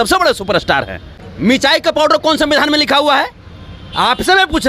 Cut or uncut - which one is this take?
cut